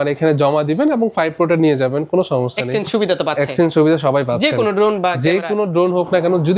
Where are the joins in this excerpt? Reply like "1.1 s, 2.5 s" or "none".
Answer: none